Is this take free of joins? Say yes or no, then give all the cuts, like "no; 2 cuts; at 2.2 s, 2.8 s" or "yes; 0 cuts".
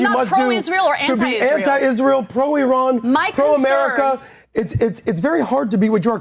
yes; 0 cuts